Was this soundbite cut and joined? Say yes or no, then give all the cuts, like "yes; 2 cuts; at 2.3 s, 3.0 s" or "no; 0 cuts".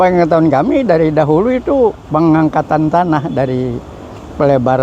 yes; 1 cut; at 2.0 s